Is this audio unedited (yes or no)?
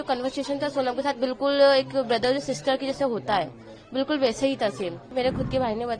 no